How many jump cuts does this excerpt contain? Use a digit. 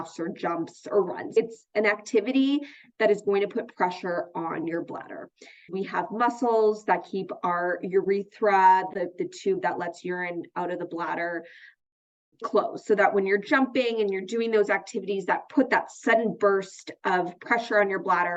0